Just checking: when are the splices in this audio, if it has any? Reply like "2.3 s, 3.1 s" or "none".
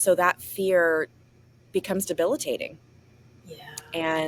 none